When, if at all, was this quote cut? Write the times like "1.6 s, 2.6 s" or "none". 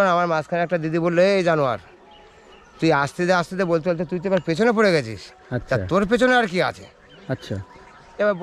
none